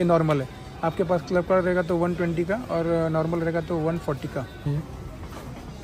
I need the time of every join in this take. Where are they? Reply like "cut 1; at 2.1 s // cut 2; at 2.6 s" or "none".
cut 1; at 4.7 s